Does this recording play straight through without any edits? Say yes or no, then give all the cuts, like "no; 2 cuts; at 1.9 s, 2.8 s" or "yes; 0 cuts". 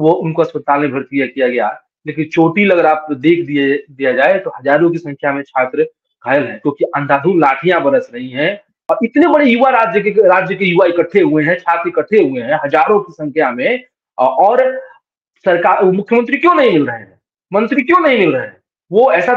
no; 1 cut; at 8.8 s